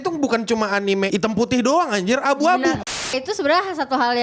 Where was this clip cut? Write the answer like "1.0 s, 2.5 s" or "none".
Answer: 1.1 s, 3.0 s

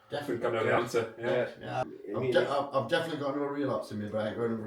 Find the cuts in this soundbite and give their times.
1.8 s

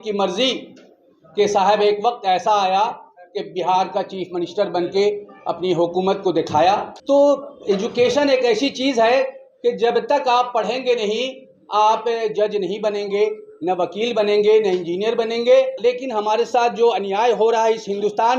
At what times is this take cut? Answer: 6.9 s, 15.7 s

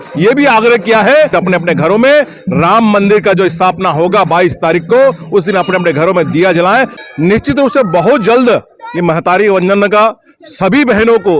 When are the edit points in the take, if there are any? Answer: 1.3 s, 6.9 s

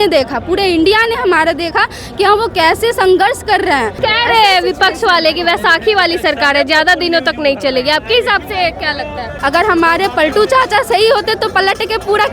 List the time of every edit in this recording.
4.0 s, 9.3 s

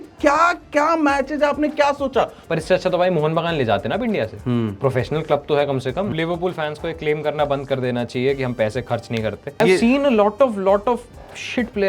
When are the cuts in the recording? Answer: 2.4 s, 6.1 s, 9.6 s

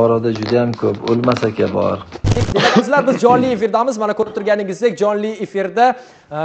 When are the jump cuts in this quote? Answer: 2.4 s

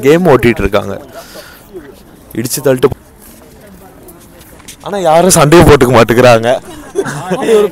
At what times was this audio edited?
2.9 s

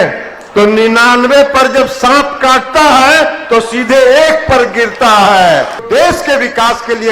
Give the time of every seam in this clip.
5.8 s

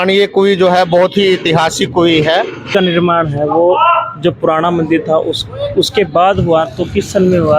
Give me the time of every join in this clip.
2.7 s

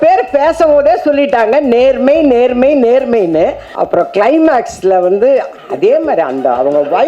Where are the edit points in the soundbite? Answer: 3.7 s

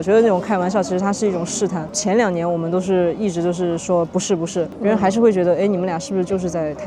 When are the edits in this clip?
none

